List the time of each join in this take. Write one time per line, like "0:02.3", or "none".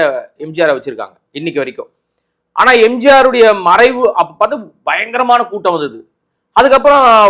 none